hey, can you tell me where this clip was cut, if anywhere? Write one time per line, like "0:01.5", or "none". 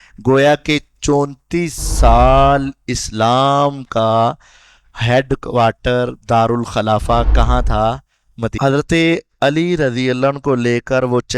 0:08.5